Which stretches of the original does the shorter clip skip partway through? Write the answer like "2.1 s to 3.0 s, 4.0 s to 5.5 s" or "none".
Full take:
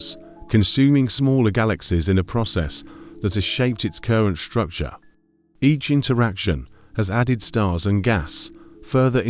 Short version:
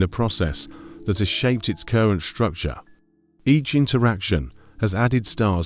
none